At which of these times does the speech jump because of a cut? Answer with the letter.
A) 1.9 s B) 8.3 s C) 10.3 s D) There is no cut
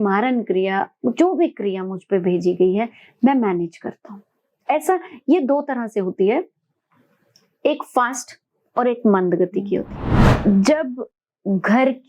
C